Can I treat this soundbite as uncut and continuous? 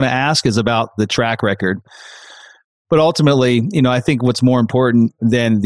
no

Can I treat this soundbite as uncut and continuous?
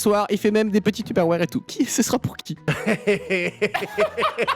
no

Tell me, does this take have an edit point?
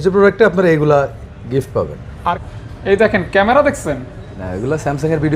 yes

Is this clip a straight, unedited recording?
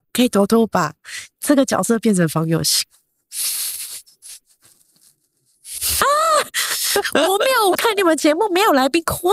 yes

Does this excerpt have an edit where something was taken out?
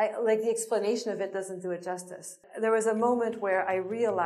yes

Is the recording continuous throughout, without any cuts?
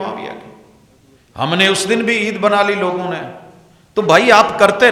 yes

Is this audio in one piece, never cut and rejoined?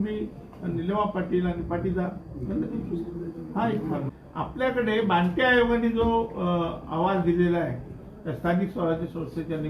no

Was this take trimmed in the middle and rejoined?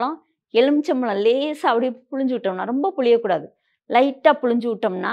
no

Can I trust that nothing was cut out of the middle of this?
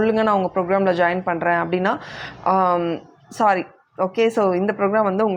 yes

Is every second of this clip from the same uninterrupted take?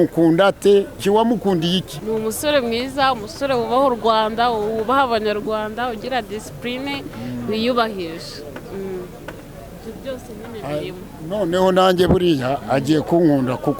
no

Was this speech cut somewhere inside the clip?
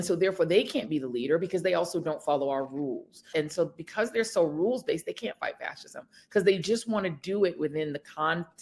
yes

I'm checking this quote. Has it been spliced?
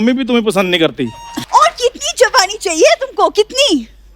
yes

